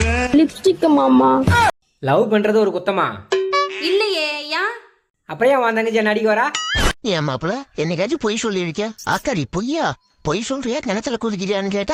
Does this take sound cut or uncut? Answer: cut